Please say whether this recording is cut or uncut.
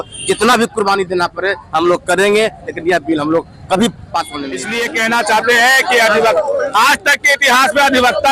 cut